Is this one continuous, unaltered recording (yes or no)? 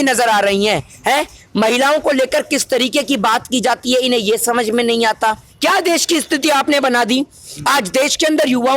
no